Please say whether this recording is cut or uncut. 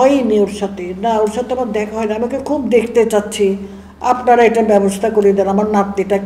uncut